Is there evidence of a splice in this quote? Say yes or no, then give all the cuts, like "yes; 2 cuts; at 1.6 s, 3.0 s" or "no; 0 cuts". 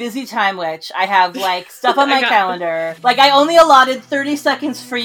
yes; 1 cut; at 2.9 s